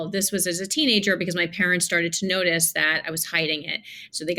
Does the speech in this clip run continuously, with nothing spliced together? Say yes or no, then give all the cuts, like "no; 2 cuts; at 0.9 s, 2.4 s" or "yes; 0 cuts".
yes; 0 cuts